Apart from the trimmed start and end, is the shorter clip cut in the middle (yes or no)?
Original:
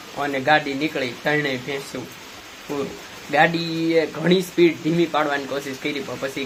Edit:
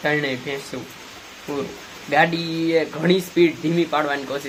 no